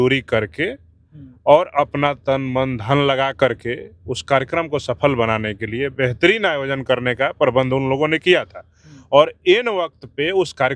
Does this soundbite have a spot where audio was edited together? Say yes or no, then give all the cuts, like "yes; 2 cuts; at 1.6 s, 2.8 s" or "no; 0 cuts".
no; 0 cuts